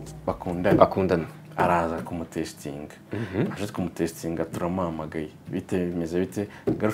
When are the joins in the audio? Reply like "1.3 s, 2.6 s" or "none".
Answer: none